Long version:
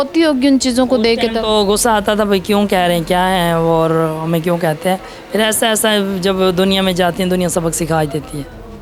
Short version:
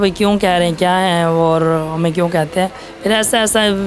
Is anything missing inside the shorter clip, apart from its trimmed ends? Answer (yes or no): no